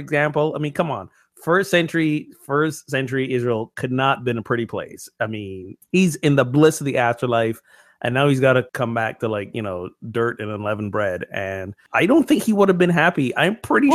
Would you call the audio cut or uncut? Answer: cut